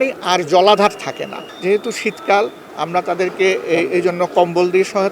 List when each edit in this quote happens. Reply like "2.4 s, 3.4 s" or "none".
1.5 s